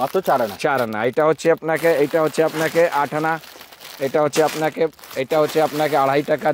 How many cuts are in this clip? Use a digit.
0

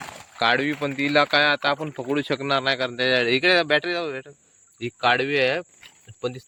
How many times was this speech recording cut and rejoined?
0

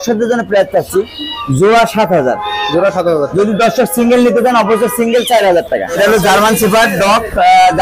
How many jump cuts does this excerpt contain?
1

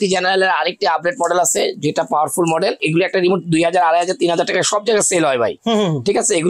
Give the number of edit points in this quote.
1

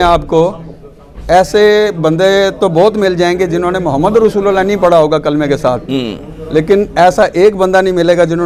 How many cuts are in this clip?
0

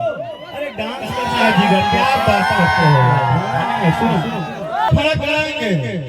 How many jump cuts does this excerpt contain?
1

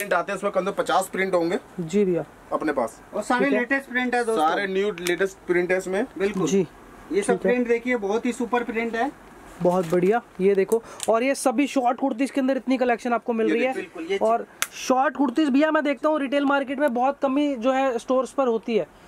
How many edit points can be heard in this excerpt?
0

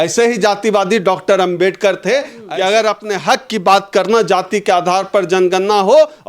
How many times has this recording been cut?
1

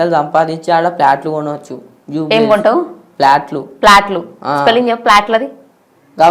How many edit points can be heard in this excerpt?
0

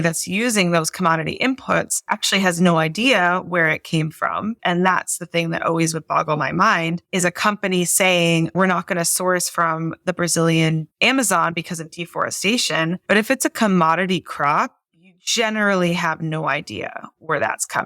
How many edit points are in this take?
2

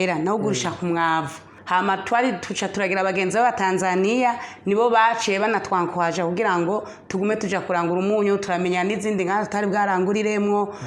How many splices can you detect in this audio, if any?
1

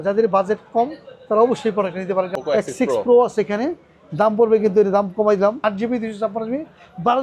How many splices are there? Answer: 2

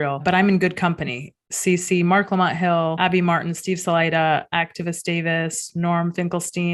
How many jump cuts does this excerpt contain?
0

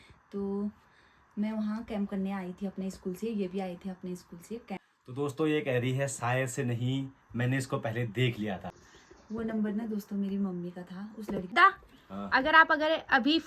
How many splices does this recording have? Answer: 3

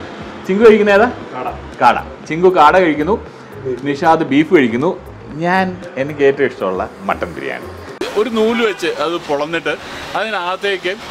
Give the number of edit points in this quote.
1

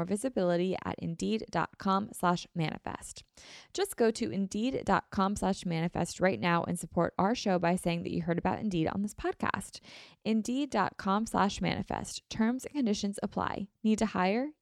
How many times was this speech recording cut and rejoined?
0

